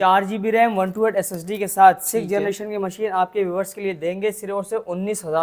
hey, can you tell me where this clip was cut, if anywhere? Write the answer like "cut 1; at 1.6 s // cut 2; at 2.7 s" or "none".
none